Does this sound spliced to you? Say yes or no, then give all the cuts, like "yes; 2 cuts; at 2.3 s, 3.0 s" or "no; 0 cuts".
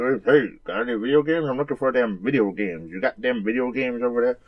yes; 1 cut; at 1.6 s